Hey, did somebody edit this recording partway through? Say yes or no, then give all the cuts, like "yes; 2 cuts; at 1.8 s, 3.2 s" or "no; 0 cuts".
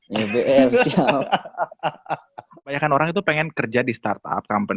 yes; 1 cut; at 2.7 s